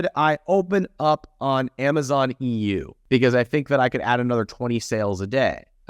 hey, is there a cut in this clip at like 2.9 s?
yes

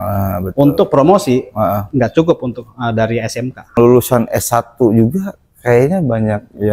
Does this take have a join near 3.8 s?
yes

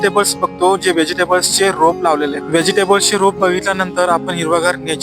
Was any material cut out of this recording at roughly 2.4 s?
yes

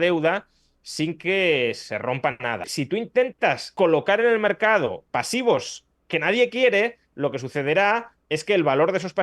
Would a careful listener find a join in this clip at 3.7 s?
yes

